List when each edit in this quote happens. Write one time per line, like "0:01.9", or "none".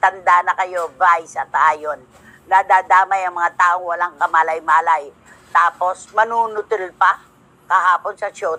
none